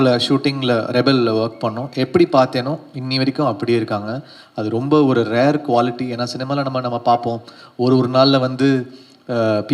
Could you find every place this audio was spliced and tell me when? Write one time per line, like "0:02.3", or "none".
none

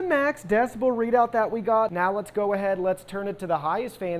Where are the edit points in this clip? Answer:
0:01.9

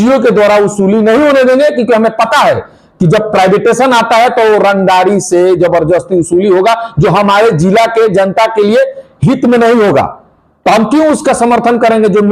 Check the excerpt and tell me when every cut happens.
none

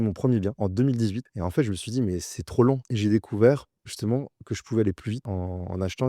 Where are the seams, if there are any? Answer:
0:00.7
0:02.9
0:05.3

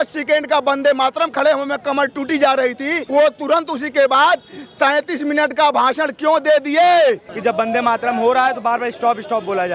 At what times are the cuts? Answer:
0:03.0
0:07.3

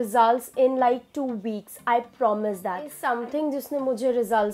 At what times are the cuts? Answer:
0:03.0

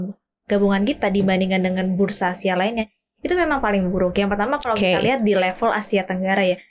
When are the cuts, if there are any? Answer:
none

